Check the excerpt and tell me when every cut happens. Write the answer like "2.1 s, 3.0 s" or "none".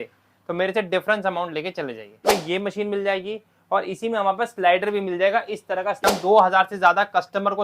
2.2 s, 6.0 s